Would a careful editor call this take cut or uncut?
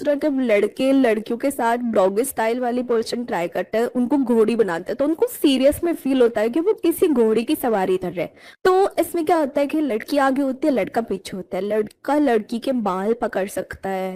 uncut